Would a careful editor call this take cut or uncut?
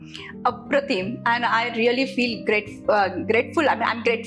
uncut